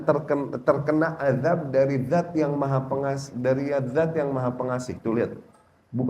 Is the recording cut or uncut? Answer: uncut